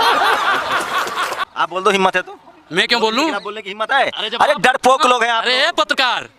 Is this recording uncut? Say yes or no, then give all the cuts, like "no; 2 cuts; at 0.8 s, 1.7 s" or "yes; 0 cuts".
no; 1 cut; at 1.5 s